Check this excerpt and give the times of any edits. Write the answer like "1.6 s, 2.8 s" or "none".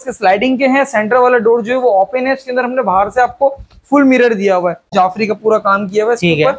4.9 s